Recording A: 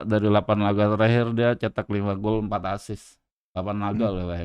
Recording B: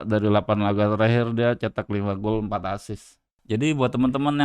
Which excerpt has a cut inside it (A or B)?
B